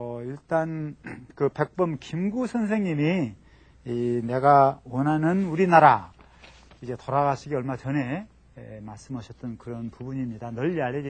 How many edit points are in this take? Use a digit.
1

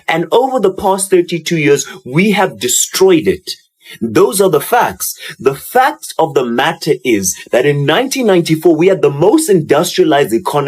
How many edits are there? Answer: 0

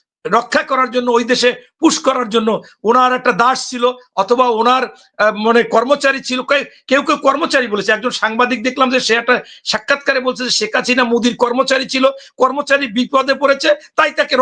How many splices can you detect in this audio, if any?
0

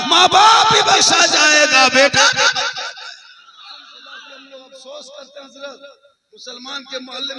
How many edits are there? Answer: 1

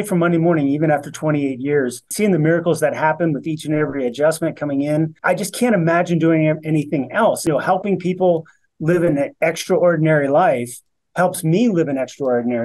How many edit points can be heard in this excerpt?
3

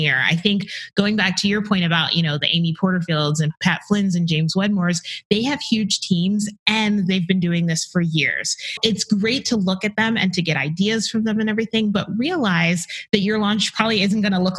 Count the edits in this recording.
2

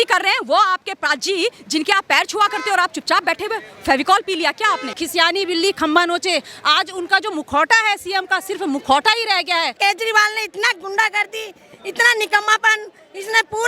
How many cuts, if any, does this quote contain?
2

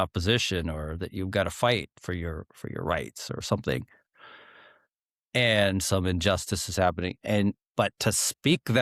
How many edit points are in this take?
0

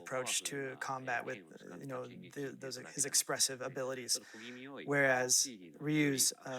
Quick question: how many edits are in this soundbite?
1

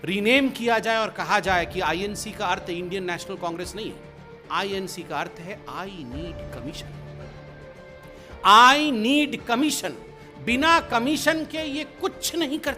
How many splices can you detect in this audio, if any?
2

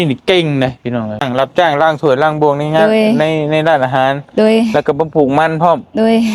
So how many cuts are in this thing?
1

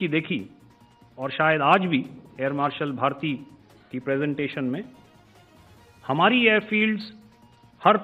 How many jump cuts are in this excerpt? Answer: 0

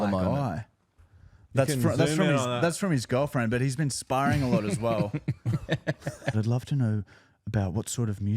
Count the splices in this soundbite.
1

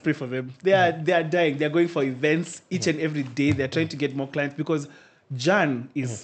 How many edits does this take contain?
0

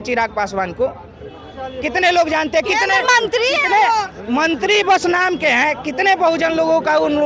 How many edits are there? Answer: 0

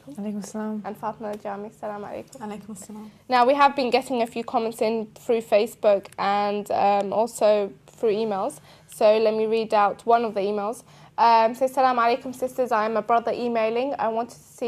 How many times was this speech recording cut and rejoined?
1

